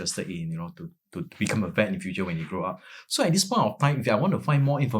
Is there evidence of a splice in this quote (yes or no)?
no